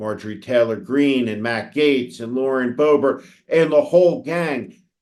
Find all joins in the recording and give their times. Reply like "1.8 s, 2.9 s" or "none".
none